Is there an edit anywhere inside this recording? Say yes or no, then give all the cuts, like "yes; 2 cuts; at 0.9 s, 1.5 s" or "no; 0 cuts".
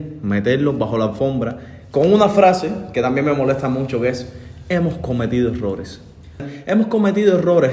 yes; 1 cut; at 6.5 s